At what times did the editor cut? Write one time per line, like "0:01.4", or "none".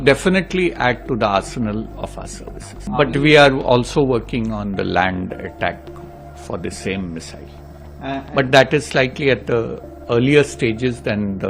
0:03.0